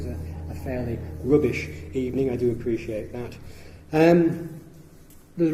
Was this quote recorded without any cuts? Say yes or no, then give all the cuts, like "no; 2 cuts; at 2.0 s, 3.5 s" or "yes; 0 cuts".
yes; 0 cuts